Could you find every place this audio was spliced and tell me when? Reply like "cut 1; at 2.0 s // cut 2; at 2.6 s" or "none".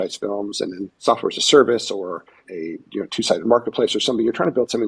cut 1; at 0.9 s // cut 2; at 2.4 s

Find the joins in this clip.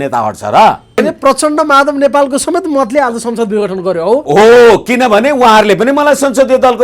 cut 1; at 1.0 s

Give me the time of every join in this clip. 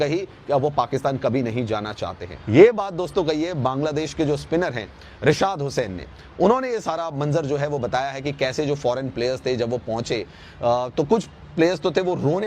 cut 1; at 2.2 s

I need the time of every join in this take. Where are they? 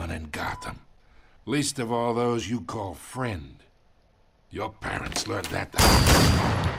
none

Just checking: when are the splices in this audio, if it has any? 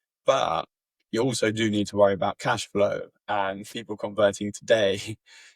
cut 1; at 3.8 s

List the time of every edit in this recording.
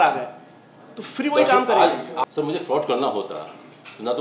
cut 1; at 2.1 s

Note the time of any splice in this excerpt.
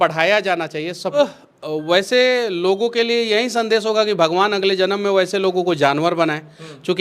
cut 1; at 1.2 s

